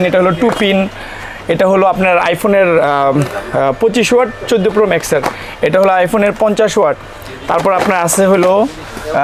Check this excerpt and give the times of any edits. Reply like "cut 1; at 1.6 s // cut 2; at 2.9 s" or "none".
none